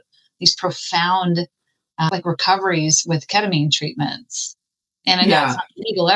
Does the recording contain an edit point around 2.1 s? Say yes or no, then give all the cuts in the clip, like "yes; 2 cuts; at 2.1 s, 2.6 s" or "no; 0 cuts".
yes; 1 cut; at 2.1 s